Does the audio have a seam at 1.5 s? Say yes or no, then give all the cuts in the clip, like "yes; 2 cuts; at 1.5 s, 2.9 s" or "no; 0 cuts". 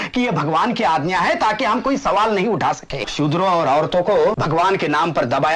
no; 2 cuts; at 3.1 s, 4.4 s